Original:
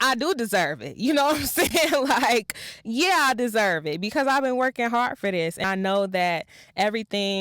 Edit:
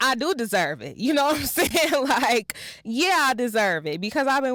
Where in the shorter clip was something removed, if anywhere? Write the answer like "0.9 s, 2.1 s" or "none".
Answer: none